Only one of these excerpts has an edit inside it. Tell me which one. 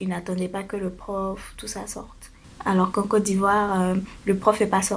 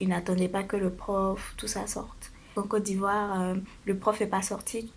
second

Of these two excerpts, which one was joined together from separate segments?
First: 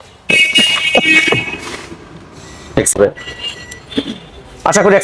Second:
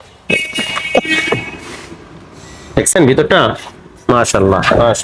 first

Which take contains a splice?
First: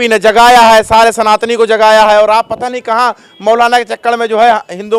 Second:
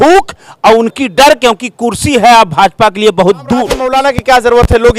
second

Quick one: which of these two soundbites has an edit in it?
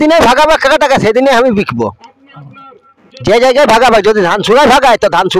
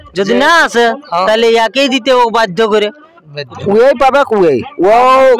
second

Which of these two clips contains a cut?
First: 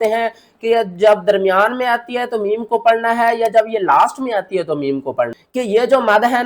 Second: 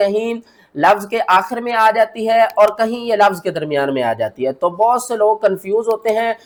first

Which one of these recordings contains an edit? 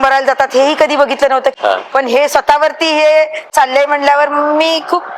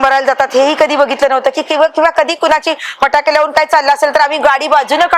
first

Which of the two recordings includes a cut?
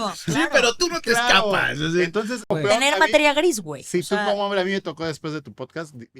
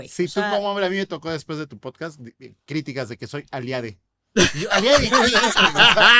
first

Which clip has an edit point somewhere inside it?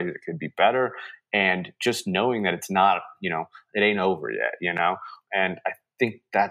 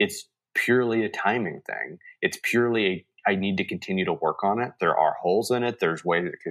first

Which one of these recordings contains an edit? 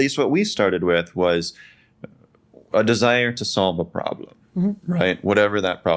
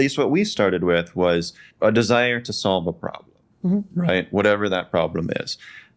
second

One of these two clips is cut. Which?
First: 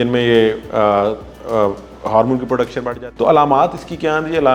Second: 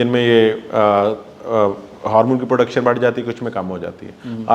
first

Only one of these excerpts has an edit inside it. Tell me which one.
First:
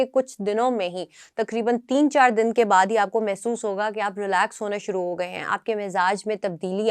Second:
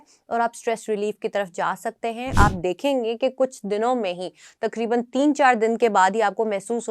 second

